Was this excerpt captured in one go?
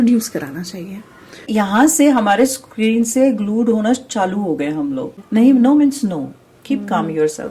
no; 2 cuts; at 1.5 s, 5.2 s

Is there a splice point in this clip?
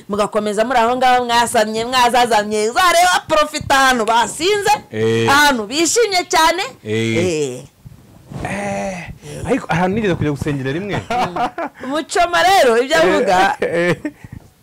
yes; 1 cut; at 11.0 s

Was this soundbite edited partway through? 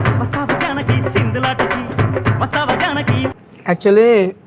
yes; 1 cut; at 3.5 s

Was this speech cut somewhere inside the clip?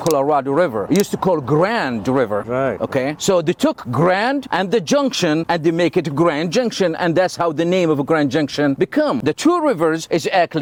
no; 0 cuts

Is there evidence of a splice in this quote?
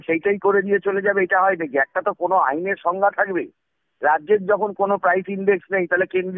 no; 0 cuts

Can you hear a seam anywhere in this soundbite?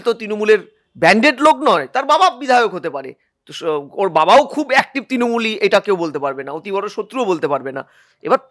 no; 0 cuts

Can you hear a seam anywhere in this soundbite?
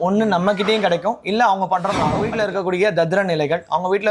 yes; 1 cut; at 2.2 s

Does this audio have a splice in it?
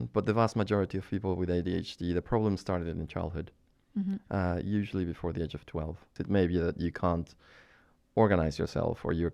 yes; 1 cut; at 6.2 s

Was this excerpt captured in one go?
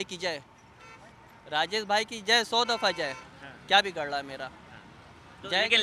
yes; 0 cuts

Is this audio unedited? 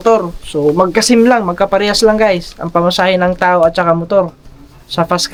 yes; 0 cuts

